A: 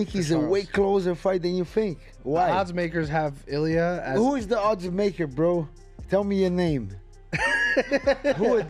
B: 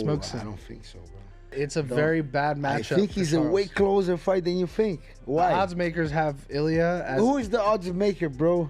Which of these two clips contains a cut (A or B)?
B